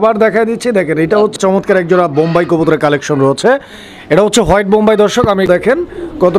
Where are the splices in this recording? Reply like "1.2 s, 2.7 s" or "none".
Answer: 1.3 s, 5.4 s